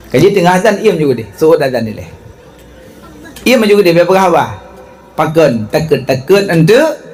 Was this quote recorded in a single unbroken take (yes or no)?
yes